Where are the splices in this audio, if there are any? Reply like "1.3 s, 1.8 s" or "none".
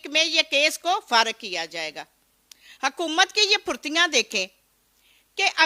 none